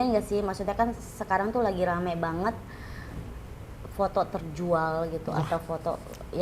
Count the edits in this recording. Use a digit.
0